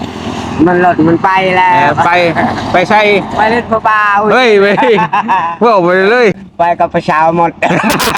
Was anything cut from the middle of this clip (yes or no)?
yes